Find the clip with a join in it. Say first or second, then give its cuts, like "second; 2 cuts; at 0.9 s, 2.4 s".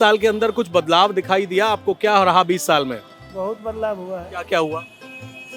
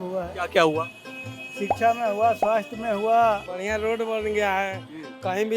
second; 1 cut; at 3.5 s